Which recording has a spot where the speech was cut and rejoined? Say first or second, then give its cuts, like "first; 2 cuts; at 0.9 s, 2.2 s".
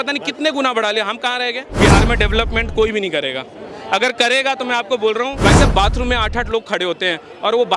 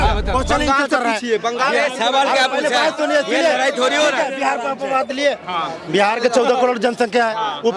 first; 2 cuts; at 1.7 s, 5.3 s